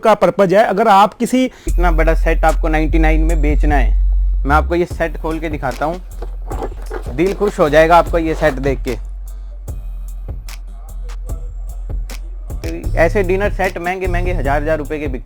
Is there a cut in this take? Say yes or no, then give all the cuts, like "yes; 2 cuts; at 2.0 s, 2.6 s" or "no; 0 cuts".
yes; 3 cuts; at 1.7 s, 6.8 s, 12.7 s